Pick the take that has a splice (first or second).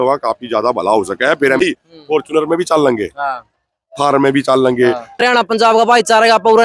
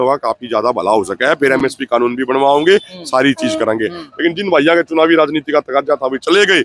first